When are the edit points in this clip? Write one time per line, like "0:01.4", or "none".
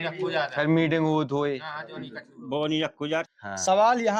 0:03.3